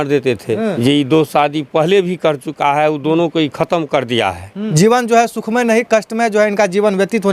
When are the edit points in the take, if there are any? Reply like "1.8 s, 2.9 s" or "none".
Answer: 0.8 s, 4.6 s